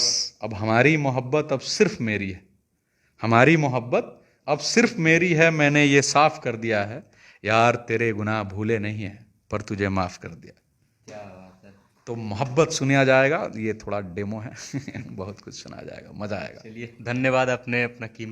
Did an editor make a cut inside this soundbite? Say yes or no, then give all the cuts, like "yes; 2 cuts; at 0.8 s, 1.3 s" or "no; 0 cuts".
no; 0 cuts